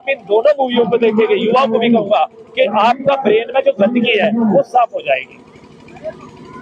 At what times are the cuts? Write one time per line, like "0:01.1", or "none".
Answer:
none